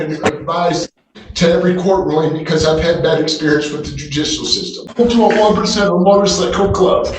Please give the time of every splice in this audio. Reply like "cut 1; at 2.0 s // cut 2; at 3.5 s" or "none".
cut 1; at 4.8 s